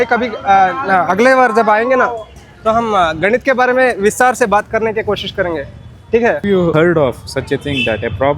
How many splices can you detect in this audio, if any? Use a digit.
1